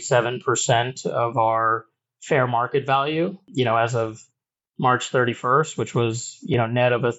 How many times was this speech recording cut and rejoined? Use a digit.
1